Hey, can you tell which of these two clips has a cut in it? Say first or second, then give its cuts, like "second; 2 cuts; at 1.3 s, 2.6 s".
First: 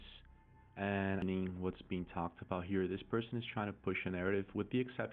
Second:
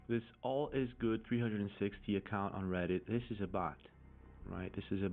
first; 1 cut; at 1.2 s